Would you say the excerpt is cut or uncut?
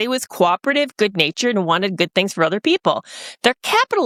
uncut